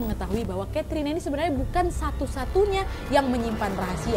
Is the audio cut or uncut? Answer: uncut